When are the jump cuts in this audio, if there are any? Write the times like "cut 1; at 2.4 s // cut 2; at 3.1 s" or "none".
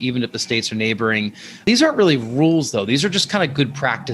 cut 1; at 1.6 s